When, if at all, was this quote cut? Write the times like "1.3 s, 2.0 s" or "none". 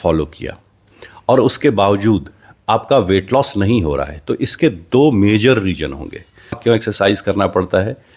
6.6 s